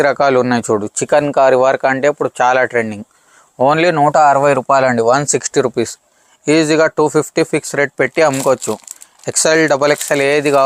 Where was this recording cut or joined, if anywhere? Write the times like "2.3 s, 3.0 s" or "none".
none